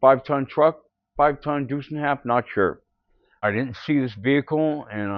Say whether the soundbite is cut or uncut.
cut